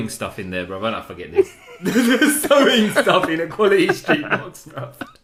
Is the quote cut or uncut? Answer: uncut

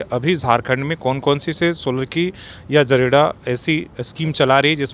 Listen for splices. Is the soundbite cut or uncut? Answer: uncut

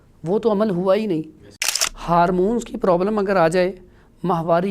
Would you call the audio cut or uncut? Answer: cut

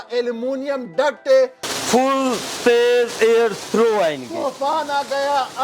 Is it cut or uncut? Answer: cut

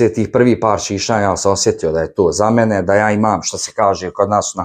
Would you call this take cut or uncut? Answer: uncut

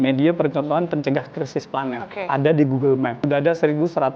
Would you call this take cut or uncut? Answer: cut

